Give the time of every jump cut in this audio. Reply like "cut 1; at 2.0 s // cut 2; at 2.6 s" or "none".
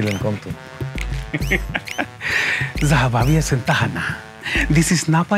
cut 1; at 1.7 s